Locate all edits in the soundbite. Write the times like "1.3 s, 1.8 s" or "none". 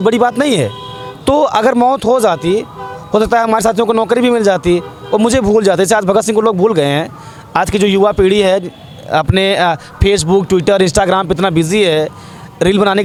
none